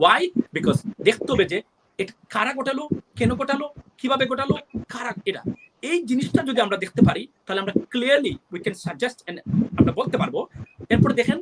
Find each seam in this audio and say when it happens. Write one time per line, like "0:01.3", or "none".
none